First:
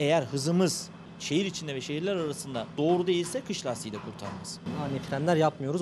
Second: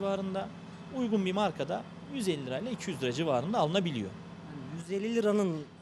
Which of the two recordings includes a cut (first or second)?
first